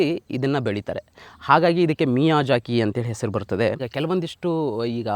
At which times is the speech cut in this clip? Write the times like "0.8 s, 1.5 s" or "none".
3.9 s

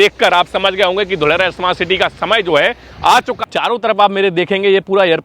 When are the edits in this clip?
3.3 s

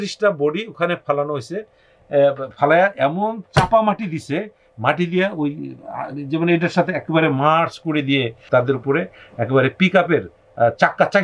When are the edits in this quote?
8.4 s

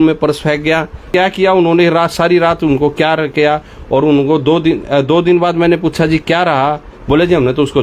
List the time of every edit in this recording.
1.1 s

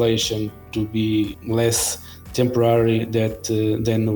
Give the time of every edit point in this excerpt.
1.4 s

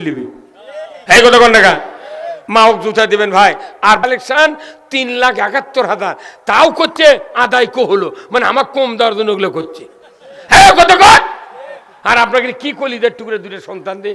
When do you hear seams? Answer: 4.0 s

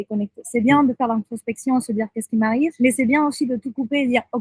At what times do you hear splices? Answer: 2.7 s

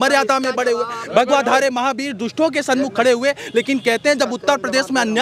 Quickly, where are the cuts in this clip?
none

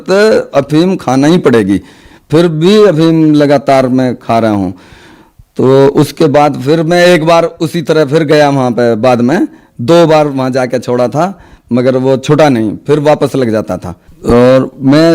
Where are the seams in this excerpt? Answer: 14.1 s

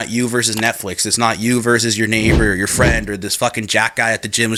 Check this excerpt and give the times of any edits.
none

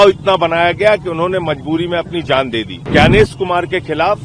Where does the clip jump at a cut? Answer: 2.9 s

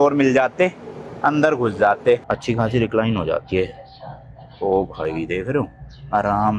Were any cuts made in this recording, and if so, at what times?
2.3 s

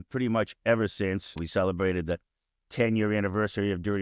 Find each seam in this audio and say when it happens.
1.4 s

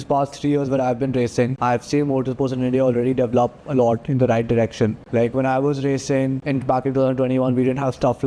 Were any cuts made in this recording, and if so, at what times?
1.5 s, 5.0 s, 6.4 s

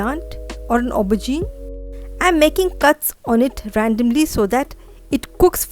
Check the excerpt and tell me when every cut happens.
none

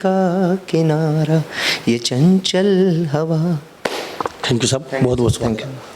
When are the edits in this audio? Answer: none

